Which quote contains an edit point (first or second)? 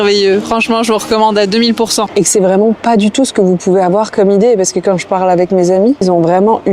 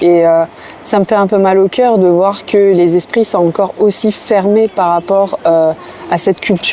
first